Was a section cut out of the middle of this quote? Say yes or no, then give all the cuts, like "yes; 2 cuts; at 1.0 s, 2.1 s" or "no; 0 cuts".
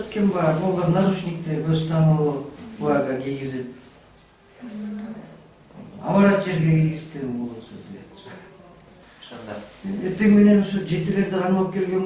no; 0 cuts